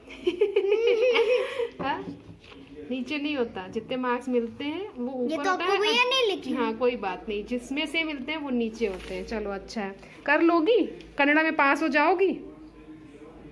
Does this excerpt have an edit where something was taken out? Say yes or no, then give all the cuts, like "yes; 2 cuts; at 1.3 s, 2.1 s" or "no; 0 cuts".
no; 0 cuts